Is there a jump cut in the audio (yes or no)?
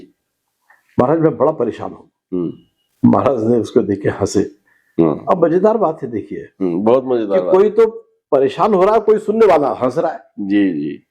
no